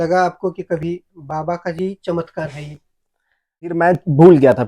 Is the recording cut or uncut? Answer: cut